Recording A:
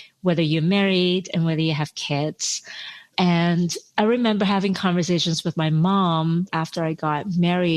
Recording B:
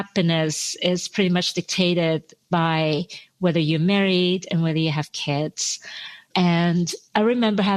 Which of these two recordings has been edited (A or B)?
A